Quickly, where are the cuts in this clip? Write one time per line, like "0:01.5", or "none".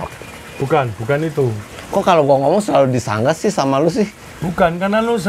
none